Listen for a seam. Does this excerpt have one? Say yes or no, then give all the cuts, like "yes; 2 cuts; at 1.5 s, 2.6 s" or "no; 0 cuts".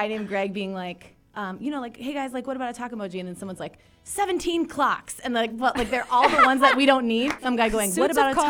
yes; 1 cut; at 7.4 s